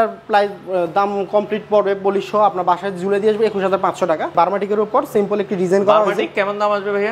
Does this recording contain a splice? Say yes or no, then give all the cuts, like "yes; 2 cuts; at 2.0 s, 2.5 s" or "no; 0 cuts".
yes; 1 cut; at 4.3 s